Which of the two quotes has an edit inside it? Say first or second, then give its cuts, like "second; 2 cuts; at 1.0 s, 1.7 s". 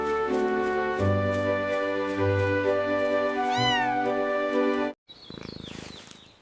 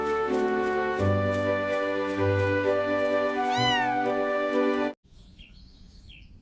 first; 1 cut; at 5.1 s